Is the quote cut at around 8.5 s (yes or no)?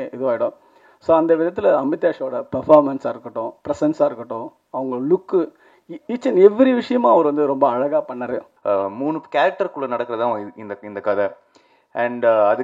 yes